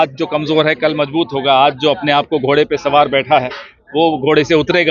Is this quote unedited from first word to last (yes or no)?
yes